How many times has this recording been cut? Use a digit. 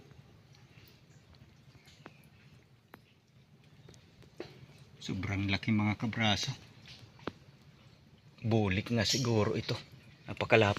1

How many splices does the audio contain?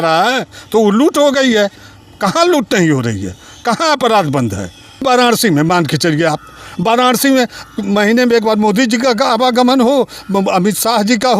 1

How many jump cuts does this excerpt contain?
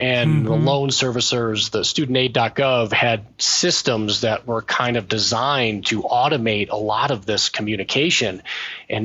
0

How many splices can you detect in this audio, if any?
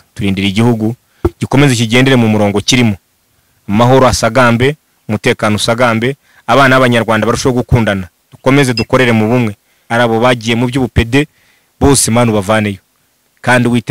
1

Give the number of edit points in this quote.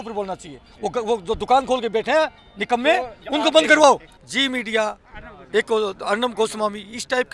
1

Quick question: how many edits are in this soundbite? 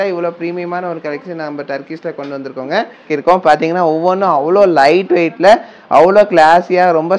1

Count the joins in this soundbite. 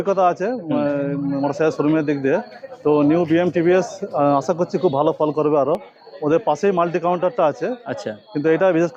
0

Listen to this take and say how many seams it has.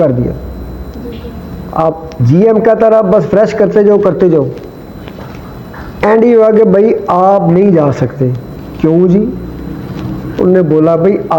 0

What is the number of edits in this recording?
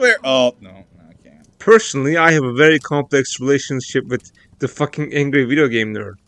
1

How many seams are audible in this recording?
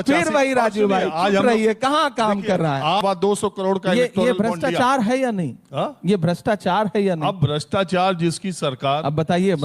1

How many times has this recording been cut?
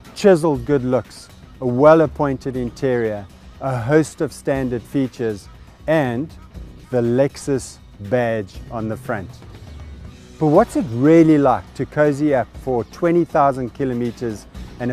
1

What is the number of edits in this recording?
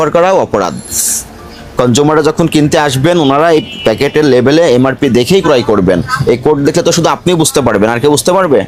0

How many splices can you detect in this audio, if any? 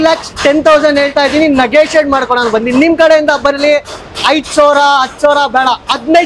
0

